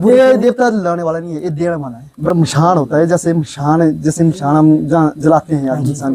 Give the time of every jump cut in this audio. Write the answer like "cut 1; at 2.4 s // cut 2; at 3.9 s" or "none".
cut 1; at 2.3 s